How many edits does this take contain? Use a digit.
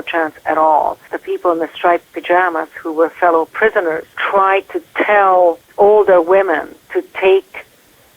3